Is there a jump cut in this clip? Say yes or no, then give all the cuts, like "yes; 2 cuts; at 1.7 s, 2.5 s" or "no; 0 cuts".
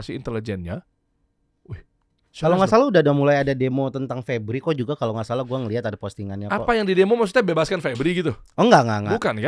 no; 0 cuts